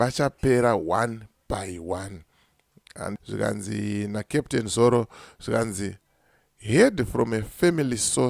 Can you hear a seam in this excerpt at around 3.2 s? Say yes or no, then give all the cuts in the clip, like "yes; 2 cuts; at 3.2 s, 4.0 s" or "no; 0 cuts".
yes; 1 cut; at 3.2 s